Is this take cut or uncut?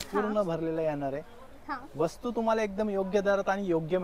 uncut